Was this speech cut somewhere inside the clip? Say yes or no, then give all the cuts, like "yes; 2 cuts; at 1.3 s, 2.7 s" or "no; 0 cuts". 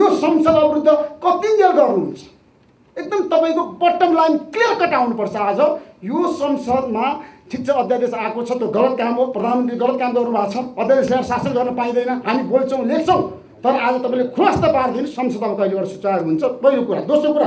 no; 0 cuts